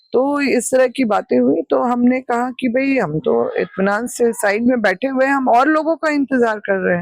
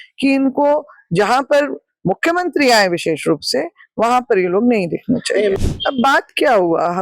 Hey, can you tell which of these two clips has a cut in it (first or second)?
second